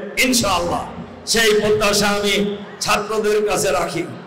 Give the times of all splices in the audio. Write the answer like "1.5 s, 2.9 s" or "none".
none